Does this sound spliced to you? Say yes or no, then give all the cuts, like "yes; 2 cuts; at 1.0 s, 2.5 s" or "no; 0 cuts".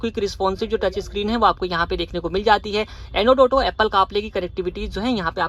no; 0 cuts